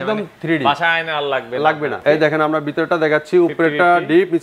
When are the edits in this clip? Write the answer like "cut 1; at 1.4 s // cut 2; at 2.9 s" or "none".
cut 1; at 2.0 s